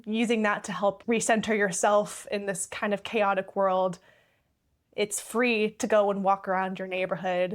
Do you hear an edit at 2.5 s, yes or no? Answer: no